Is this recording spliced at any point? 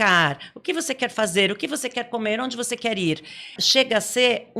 yes; 1 cut; at 3.6 s

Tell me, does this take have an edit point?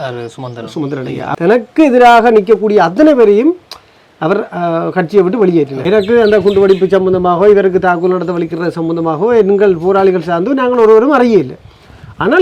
yes; 2 cuts; at 1.2 s, 5.8 s

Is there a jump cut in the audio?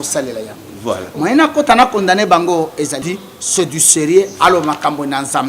yes; 1 cut; at 3.1 s

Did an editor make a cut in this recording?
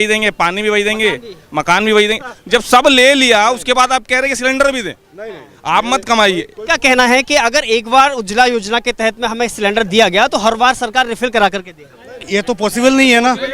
yes; 1 cut; at 6.6 s

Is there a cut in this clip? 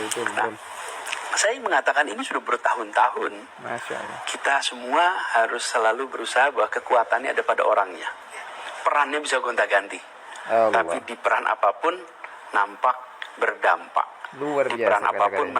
no; 0 cuts

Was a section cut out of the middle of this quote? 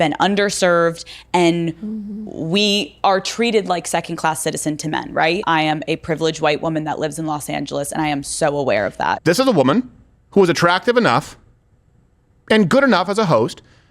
yes; 2 cuts; at 5.4 s, 9.2 s

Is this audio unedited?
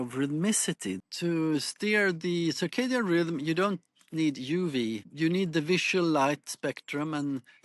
no; 2 cuts; at 1.0 s, 5.1 s

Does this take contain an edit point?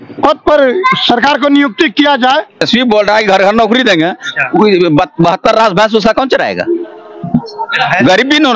yes; 1 cut; at 2.6 s

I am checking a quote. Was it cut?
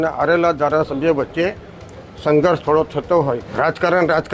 yes; 1 cut; at 3.4 s

